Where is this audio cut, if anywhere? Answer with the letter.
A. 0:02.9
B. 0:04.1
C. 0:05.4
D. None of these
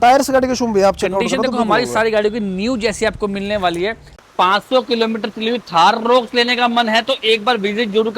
B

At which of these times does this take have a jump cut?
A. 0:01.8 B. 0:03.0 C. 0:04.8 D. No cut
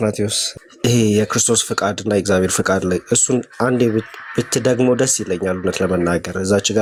D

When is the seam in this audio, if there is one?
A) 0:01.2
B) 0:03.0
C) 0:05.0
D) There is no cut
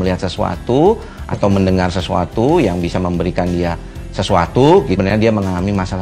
C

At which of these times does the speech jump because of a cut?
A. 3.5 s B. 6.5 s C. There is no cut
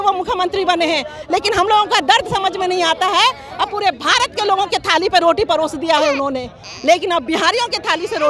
C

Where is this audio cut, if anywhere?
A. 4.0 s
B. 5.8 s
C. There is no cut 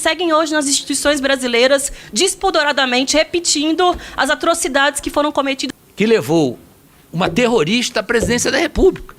B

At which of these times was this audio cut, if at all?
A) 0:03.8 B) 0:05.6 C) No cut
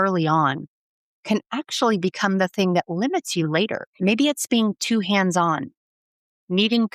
A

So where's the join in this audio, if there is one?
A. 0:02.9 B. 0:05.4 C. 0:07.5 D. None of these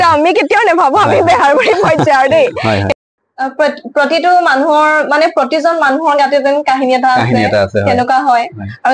A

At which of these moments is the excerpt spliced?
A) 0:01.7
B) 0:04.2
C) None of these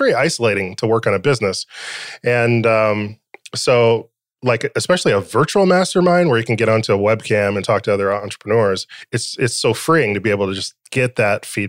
C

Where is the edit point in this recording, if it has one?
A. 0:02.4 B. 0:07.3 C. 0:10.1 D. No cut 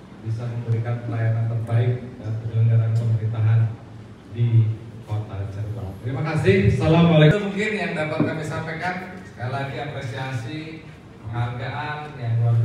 D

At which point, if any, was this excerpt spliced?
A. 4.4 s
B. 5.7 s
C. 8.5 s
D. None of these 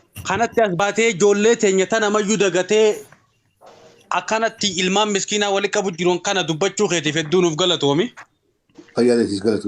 A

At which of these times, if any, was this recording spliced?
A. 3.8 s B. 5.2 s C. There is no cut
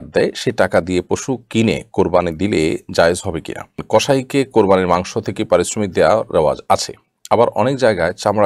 A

